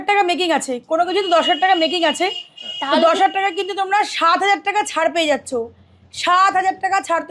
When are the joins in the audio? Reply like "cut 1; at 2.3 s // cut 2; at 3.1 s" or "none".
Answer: none